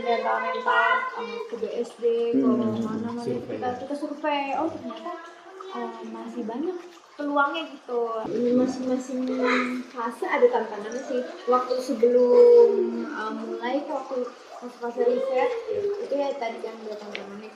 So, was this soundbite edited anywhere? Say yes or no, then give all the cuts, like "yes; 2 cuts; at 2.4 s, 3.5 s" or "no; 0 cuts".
yes; 1 cut; at 8.2 s